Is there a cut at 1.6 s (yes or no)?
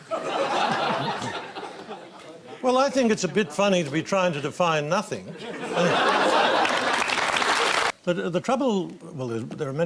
no